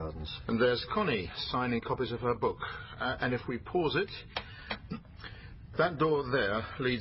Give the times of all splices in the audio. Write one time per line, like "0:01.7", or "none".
0:02.1